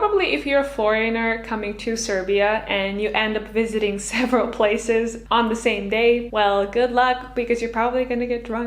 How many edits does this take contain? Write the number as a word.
two